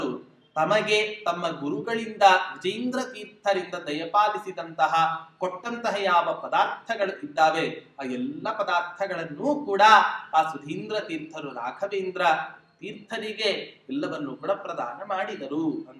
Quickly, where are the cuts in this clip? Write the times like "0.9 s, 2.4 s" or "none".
none